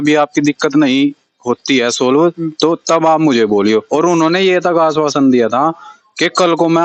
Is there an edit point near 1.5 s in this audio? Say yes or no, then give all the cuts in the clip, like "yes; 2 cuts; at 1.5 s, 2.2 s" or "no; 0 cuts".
no; 0 cuts